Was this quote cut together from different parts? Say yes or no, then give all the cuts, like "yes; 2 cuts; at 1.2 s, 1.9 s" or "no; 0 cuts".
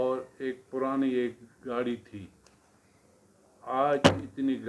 no; 0 cuts